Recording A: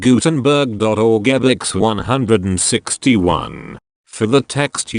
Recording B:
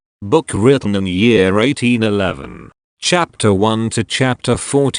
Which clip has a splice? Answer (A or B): B